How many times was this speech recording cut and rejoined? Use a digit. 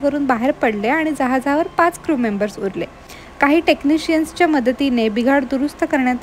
0